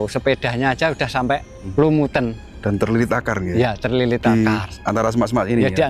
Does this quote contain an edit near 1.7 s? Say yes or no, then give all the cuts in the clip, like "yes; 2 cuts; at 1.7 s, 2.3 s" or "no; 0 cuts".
yes; 1 cut; at 1.7 s